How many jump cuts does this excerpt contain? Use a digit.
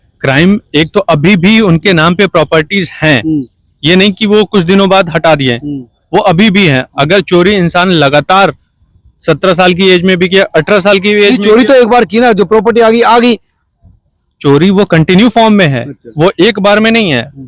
0